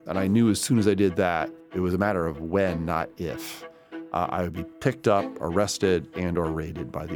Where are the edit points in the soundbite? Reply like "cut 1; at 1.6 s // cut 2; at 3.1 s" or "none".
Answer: cut 1; at 1.6 s